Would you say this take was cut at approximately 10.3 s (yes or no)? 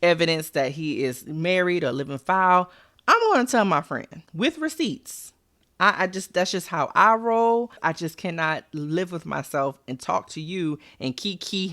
no